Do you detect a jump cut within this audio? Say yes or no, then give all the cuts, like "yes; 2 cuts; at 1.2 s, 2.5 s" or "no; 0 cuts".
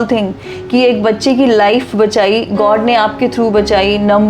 no; 0 cuts